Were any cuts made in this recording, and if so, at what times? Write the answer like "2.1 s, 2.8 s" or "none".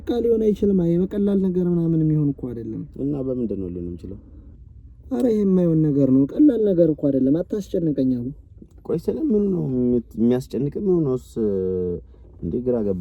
none